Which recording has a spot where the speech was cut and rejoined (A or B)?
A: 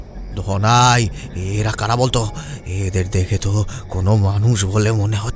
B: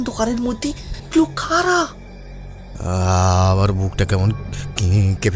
B